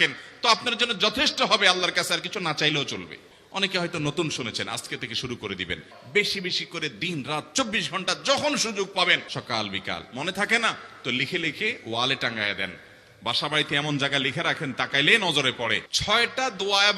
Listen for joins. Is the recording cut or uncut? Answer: cut